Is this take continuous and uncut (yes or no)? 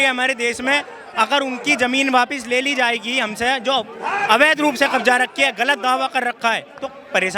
yes